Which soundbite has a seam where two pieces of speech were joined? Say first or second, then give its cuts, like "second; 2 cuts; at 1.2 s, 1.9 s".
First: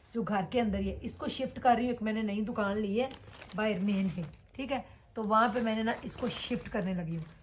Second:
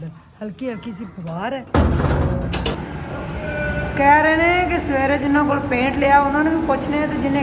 second; 1 cut; at 2.7 s